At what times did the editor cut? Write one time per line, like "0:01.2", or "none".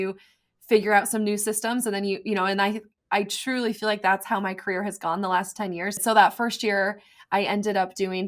0:06.0